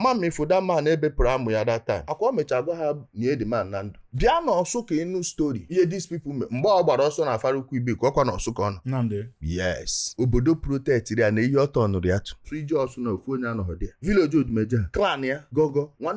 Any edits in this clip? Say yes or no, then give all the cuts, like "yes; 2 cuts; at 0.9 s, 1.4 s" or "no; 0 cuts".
no; 0 cuts